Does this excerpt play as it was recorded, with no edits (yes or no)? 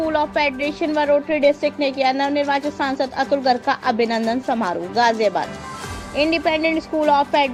yes